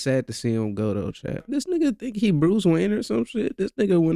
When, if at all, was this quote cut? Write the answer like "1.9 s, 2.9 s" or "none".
1.5 s